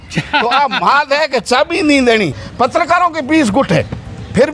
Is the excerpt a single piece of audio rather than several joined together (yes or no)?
no